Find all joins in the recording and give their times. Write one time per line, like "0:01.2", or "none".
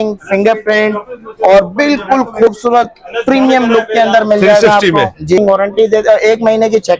0:05.4